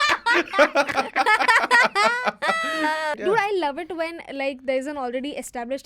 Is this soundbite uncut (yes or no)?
no